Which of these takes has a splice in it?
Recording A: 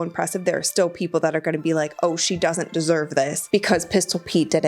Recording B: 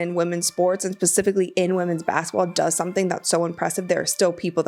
A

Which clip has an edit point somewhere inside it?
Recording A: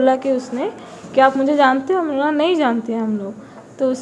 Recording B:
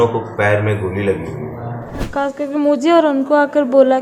B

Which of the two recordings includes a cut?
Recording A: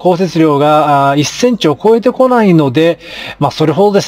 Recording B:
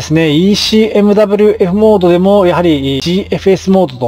B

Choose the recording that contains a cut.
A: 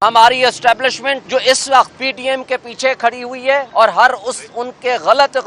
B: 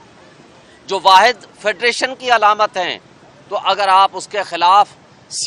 A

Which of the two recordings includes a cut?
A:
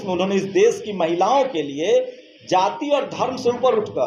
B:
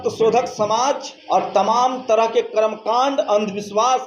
B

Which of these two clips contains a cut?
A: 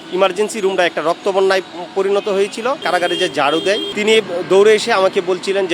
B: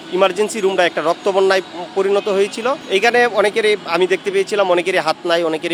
A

